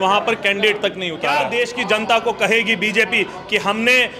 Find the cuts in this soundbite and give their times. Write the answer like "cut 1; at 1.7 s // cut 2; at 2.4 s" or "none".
cut 1; at 1.4 s